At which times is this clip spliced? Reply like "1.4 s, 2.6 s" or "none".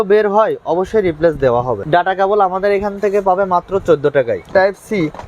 1.8 s, 4.5 s

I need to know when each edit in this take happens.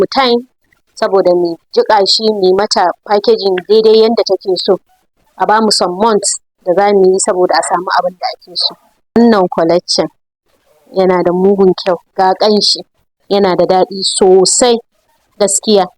9.1 s

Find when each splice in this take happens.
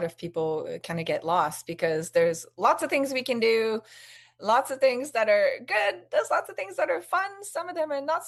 none

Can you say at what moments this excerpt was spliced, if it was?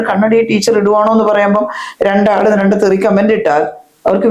none

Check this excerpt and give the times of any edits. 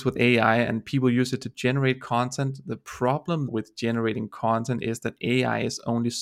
3.5 s

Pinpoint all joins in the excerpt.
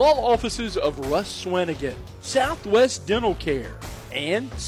none

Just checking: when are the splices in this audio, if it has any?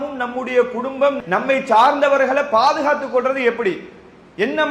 1.2 s

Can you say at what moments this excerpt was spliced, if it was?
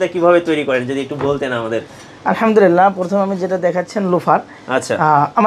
none

